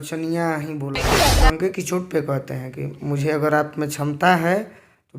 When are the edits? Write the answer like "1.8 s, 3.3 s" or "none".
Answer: 1.2 s